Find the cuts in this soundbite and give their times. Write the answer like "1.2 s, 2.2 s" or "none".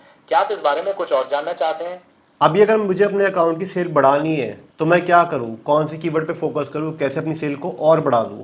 2.2 s

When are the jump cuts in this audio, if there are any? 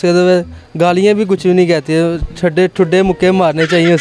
none

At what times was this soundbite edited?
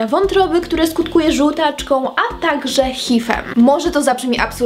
none

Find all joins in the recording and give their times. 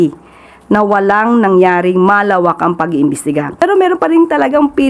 3.6 s

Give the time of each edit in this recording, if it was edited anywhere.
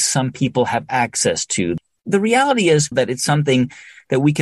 2.9 s

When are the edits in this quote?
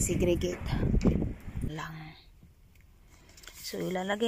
1.6 s

